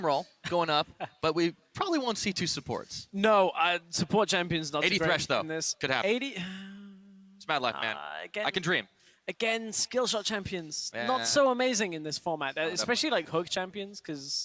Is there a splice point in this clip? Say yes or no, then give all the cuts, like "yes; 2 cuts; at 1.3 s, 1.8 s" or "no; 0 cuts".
yes; 1 cut; at 2.8 s